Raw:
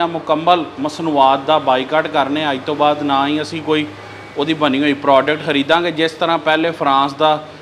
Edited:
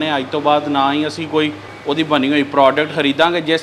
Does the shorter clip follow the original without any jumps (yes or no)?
no